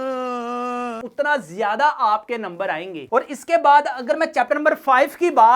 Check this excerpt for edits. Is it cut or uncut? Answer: cut